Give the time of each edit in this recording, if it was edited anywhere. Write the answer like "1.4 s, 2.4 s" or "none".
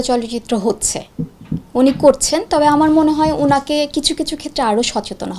none